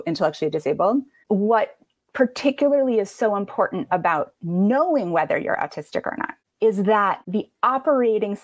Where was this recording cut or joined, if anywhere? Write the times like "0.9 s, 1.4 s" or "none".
1.1 s, 7.2 s

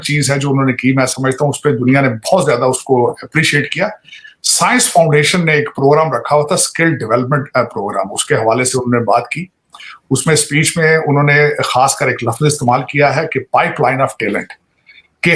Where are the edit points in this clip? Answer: none

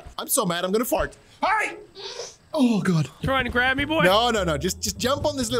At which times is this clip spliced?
3.2 s

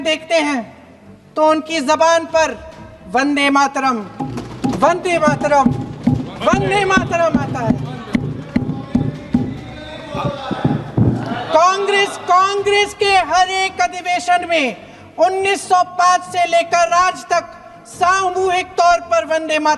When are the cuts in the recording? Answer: none

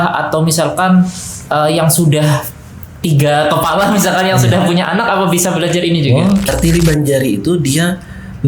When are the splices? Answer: 6.5 s

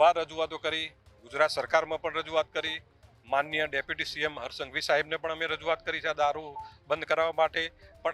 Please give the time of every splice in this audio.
none

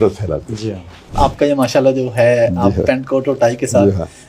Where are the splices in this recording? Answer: 1.1 s

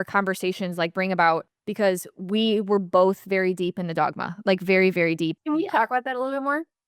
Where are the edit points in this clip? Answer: 1.6 s, 5.4 s

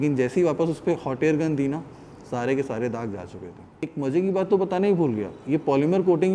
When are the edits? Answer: 3.9 s

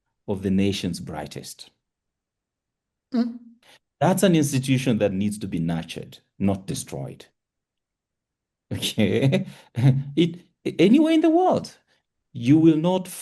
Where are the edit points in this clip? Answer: none

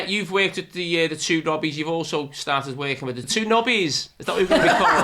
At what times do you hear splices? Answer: 3.2 s

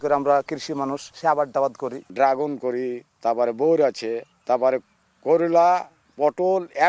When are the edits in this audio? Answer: 1.0 s, 2.0 s, 3.1 s, 4.3 s, 6.0 s

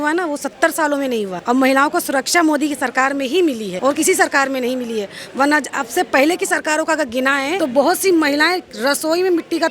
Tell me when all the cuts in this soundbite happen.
1.4 s, 3.7 s, 7.6 s

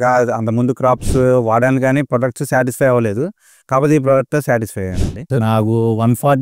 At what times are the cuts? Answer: 5.2 s

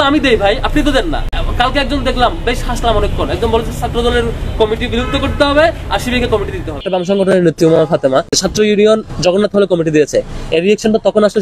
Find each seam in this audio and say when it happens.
1.4 s, 6.8 s, 8.4 s

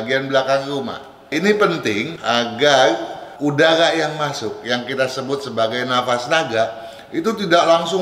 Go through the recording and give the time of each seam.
1.1 s

